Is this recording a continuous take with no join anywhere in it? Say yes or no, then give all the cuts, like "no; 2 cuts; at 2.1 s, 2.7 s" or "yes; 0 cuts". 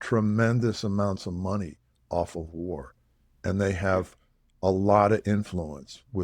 yes; 0 cuts